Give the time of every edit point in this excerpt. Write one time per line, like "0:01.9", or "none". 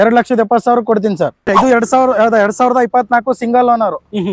0:01.5